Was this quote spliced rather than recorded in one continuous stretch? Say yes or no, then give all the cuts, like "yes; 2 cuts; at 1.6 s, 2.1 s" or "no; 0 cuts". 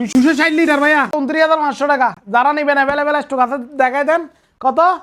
yes; 1 cut; at 1.1 s